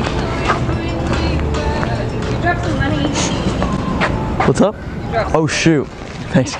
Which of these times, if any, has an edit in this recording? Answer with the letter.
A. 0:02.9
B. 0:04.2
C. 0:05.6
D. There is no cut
D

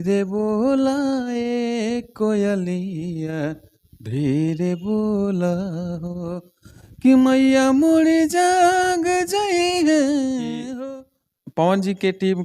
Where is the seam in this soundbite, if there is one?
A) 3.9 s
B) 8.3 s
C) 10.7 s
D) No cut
C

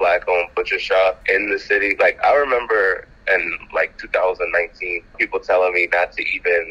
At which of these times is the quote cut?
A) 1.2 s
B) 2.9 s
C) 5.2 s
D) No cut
A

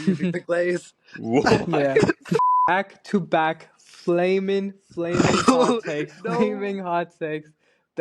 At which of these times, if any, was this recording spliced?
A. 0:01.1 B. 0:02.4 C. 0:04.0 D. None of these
B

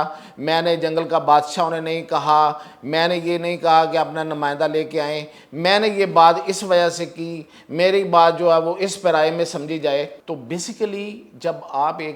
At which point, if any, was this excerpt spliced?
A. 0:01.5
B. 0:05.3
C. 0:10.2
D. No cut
C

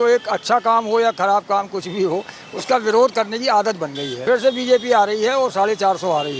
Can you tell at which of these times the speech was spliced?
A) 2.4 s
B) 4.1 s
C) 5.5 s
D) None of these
B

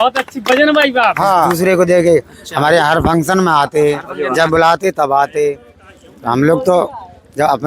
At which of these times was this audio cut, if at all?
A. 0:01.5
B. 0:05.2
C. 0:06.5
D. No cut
A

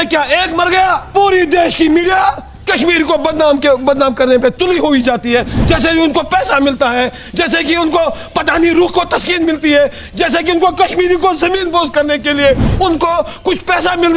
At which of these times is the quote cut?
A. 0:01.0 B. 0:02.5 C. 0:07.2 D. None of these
A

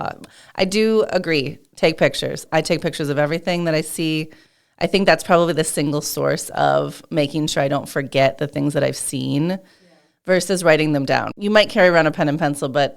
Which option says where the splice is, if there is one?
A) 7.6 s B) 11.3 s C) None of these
B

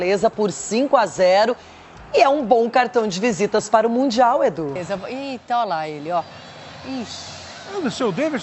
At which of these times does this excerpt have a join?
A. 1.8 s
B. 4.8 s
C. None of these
B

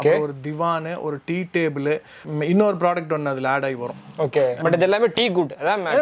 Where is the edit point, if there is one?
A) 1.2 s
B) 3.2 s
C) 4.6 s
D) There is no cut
C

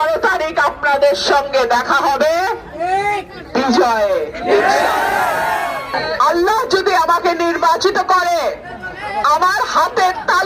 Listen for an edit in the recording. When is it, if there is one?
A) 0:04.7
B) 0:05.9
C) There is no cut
B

